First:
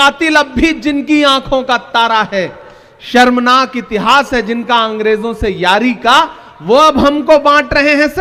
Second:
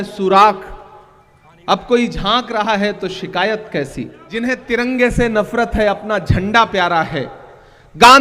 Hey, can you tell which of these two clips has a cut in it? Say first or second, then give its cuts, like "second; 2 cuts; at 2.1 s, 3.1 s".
second; 1 cut; at 4.2 s